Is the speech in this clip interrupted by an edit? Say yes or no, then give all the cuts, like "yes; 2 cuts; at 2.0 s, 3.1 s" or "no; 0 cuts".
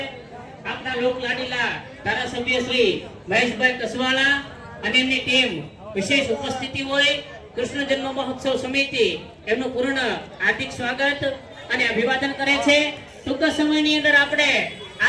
no; 0 cuts